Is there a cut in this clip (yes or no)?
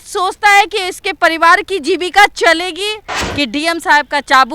yes